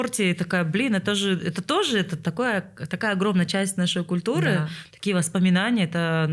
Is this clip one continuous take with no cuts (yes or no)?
yes